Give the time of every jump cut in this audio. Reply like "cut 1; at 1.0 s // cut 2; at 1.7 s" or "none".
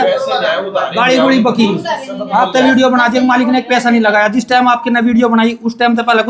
none